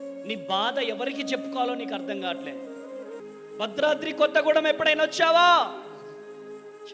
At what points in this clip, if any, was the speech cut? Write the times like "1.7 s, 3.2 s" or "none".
3.2 s